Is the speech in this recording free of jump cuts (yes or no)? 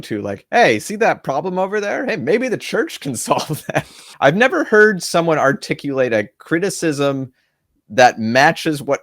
no